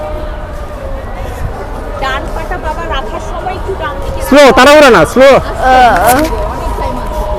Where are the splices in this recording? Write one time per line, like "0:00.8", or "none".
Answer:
none